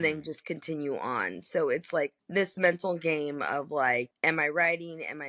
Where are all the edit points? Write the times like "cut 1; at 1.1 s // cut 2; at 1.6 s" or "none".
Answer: cut 1; at 2.2 s // cut 2; at 4.1 s